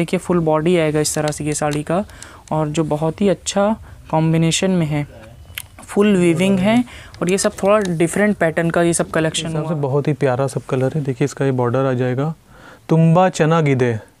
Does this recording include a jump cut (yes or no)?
yes